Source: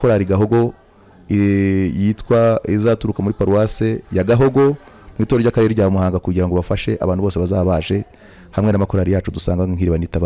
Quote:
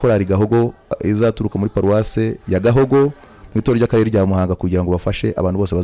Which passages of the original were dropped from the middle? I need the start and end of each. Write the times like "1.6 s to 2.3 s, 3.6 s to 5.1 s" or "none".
1.0 s to 2.6 s